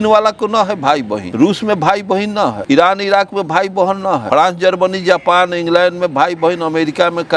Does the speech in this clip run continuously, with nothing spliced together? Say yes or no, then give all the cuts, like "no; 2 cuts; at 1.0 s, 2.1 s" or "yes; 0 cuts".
no; 3 cuts; at 1.2 s, 2.6 s, 4.2 s